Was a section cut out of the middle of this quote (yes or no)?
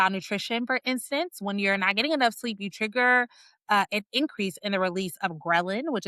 no